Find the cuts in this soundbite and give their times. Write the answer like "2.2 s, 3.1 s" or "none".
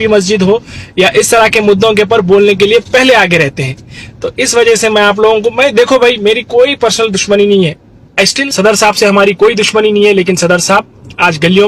8.4 s